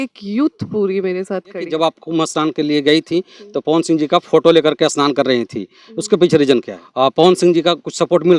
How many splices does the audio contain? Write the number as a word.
two